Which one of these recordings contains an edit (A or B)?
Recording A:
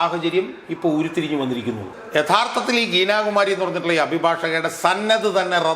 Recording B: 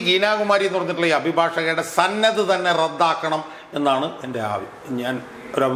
A